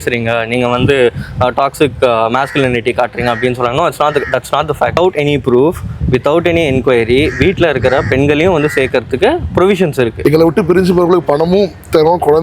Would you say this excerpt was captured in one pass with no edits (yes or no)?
no